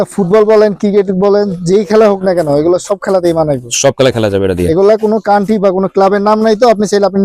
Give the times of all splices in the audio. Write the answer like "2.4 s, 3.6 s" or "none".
none